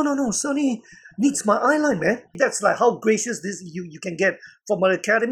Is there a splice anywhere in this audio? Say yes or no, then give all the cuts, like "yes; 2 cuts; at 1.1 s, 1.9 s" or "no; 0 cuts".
yes; 1 cut; at 2.3 s